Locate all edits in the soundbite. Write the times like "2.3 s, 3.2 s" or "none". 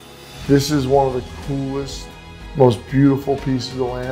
none